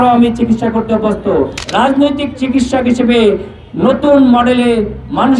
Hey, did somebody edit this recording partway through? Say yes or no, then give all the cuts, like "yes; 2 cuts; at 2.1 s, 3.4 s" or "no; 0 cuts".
yes; 1 cut; at 1.6 s